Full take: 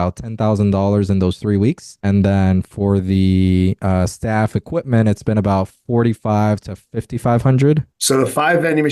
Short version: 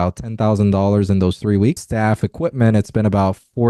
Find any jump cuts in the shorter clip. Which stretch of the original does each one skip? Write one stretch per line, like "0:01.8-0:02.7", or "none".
0:01.9-0:04.2

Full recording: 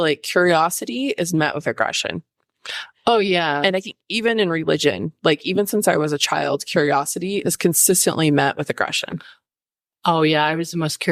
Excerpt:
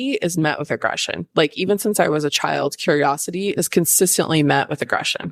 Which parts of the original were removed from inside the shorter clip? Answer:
0:02.2-0:05.1

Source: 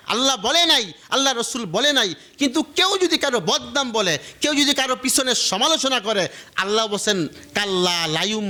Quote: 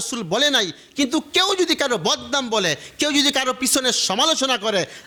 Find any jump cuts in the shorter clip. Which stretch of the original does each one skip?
none

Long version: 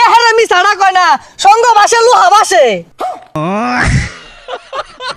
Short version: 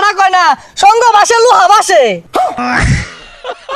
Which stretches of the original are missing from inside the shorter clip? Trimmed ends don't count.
0:03.2-0:03.6

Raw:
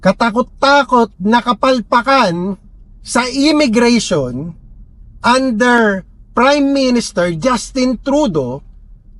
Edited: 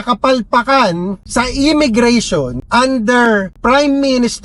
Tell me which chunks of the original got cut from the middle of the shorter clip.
0:02.6-0:03.0
0:04.4-0:05.1
0:06.0-0:06.2

